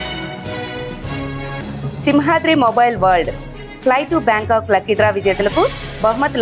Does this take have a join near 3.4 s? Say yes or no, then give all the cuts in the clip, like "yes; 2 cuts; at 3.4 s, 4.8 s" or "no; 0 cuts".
no; 1 cut; at 1.0 s